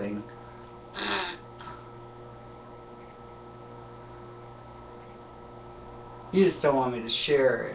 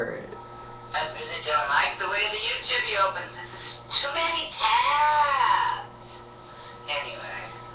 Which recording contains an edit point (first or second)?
second